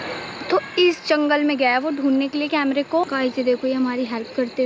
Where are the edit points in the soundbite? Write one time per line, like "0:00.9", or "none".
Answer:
0:03.0